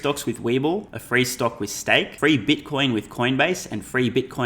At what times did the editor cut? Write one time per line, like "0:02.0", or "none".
0:01.0
0:02.1